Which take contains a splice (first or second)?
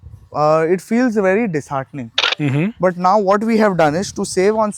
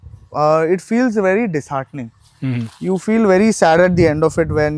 first